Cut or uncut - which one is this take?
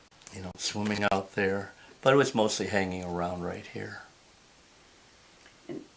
cut